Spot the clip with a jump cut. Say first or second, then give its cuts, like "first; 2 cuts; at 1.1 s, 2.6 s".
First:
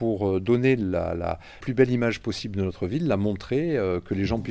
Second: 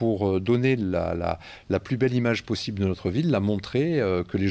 first; 1 cut; at 1.6 s